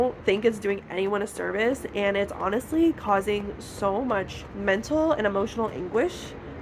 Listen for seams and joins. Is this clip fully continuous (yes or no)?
yes